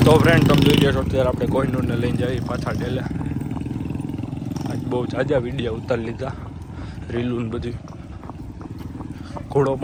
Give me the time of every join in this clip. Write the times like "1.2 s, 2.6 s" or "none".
none